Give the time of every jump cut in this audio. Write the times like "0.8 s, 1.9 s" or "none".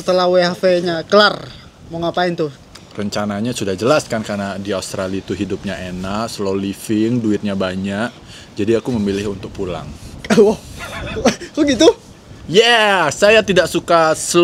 2.7 s